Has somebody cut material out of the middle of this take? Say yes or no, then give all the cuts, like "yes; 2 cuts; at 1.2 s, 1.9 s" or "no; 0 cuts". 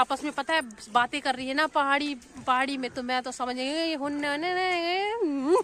no; 0 cuts